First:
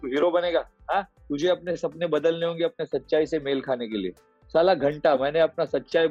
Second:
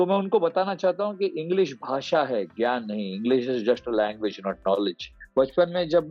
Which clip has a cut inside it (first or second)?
second